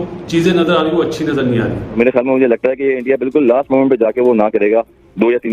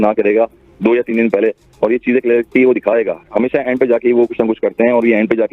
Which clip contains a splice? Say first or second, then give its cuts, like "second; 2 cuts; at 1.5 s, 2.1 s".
first; 1 cut; at 2.0 s